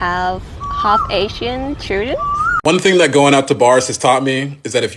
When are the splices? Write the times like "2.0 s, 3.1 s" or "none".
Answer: 2.5 s